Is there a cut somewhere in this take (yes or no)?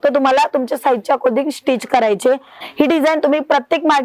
yes